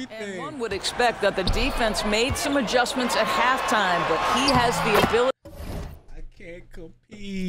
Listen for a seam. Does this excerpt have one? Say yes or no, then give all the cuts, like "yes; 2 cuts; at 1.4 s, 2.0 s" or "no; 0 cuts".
no; 0 cuts